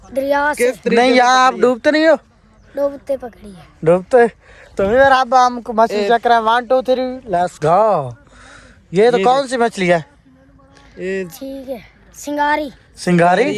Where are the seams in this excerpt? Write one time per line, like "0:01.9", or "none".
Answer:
none